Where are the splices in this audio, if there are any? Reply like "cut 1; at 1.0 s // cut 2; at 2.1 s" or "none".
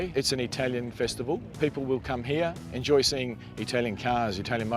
cut 1; at 1.5 s // cut 2; at 2.7 s